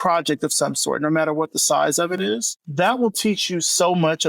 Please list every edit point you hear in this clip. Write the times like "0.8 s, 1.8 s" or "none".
2.5 s

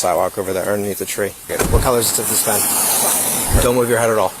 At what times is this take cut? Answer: 1.7 s, 3.6 s

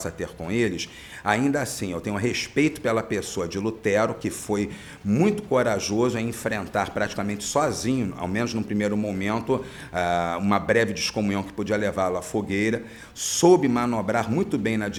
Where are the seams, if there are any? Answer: none

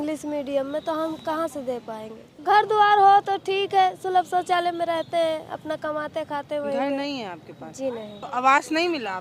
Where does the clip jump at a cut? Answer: 2.4 s, 8.2 s

